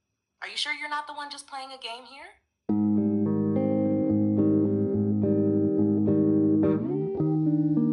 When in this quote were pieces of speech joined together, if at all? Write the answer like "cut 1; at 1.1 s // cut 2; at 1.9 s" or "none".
cut 1; at 2.6 s